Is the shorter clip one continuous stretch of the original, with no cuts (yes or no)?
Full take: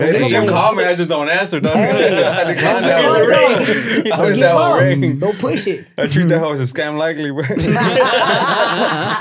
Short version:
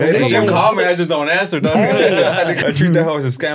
no